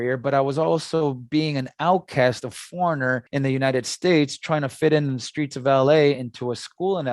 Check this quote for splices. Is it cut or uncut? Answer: cut